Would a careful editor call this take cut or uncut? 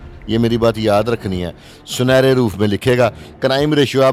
uncut